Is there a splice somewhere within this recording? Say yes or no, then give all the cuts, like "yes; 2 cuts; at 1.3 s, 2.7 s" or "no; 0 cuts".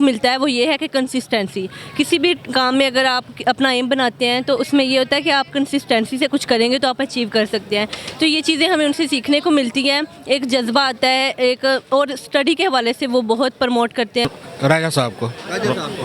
yes; 1 cut; at 14.2 s